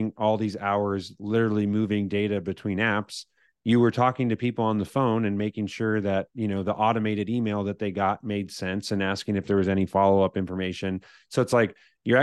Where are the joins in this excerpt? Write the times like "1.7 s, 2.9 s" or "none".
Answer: none